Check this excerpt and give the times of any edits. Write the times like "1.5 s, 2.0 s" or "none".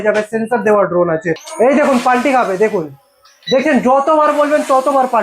1.5 s

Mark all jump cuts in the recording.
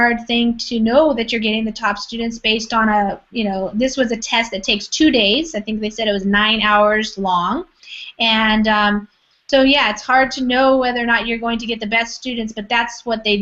9.0 s

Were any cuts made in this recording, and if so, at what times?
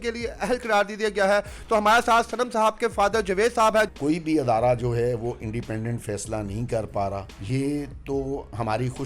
3.9 s, 7.3 s

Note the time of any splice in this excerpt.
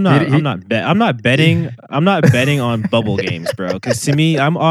none

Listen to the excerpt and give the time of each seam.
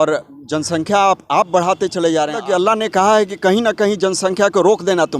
2.4 s

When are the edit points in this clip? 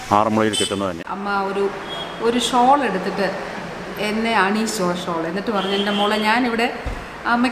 1.0 s

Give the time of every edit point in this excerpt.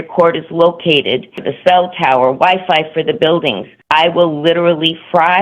1.4 s, 3.7 s

